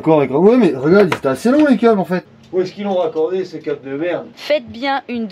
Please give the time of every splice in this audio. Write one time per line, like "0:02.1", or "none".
0:02.3
0:04.3